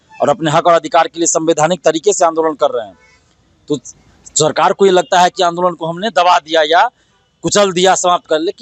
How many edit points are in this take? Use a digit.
0